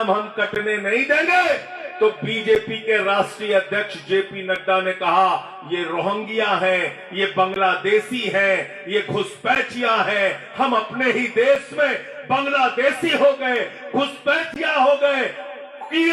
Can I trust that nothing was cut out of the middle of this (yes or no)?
yes